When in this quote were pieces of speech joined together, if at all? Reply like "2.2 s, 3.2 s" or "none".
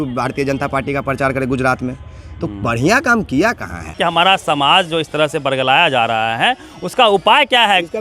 3.9 s